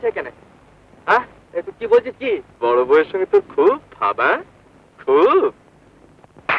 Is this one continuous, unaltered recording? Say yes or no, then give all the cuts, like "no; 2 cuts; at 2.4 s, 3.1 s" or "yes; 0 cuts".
no; 1 cut; at 2.5 s